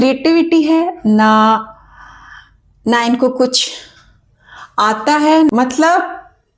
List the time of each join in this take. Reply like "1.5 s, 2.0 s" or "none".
5.5 s